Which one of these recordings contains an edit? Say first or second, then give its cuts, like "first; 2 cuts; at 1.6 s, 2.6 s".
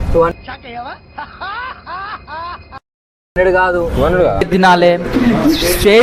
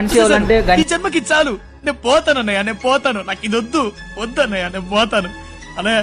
first; 1 cut; at 4.5 s